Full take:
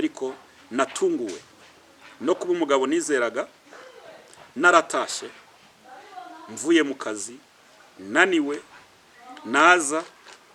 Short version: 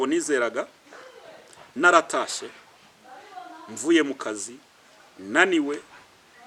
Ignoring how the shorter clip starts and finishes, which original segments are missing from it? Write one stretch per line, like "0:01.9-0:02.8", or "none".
none